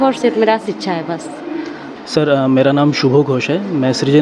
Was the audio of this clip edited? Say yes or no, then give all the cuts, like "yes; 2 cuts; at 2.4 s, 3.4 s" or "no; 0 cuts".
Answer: no; 0 cuts